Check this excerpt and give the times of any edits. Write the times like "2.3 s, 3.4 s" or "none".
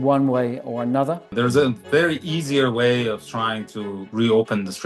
1.3 s